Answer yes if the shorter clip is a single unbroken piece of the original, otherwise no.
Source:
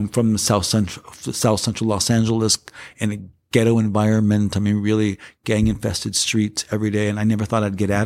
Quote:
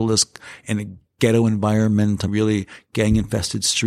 no